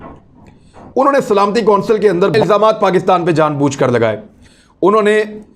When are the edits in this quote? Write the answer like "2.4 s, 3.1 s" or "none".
2.3 s, 4.3 s